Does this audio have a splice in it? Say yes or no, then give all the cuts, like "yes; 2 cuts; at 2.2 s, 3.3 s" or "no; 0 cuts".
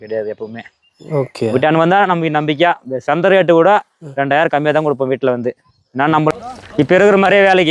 yes; 1 cut; at 6.3 s